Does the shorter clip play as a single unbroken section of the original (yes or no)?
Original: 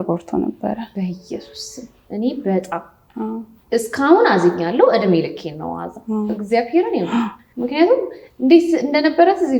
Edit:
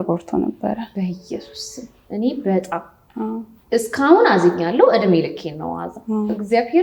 yes